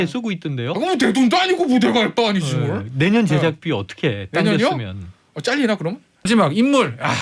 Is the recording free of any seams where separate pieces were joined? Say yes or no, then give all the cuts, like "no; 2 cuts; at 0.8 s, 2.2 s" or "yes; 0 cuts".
no; 1 cut; at 6.2 s